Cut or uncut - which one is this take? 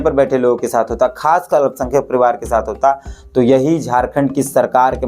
uncut